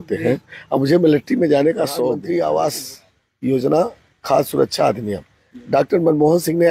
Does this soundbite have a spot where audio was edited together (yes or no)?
yes